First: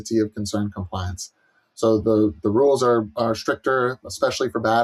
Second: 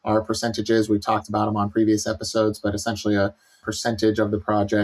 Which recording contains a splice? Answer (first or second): second